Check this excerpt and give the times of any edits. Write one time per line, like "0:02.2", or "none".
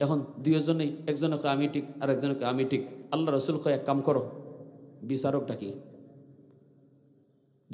none